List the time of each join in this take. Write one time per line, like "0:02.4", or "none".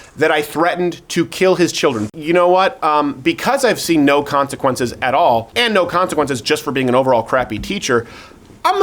0:02.0
0:05.5